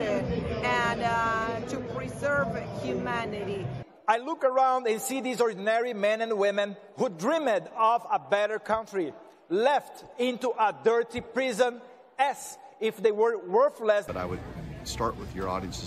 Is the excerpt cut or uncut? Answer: cut